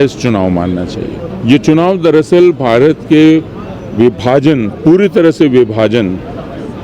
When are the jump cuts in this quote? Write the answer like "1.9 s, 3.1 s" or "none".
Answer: 1.3 s